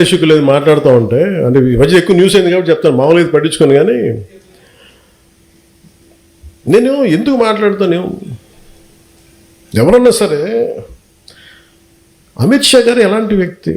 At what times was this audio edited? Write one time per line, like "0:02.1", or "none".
0:02.9